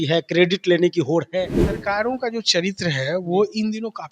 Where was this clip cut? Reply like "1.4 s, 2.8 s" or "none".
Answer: 1.8 s